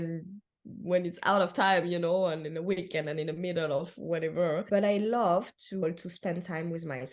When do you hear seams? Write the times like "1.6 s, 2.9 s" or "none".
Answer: 4.6 s, 5.8 s